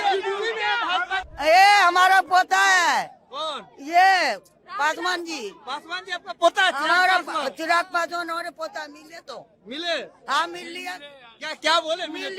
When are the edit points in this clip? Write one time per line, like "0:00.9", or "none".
0:01.3